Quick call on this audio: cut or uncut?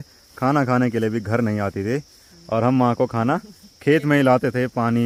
uncut